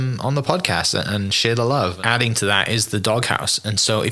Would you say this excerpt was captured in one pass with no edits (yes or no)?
no